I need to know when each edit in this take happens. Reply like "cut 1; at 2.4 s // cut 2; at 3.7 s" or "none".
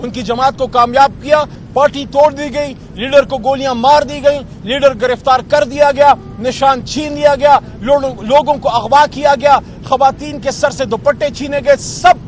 cut 1; at 1.6 s